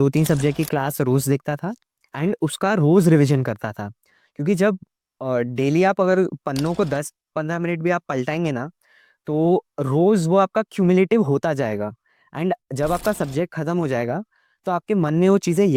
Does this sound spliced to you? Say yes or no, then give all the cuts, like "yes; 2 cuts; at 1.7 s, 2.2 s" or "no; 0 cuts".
no; 0 cuts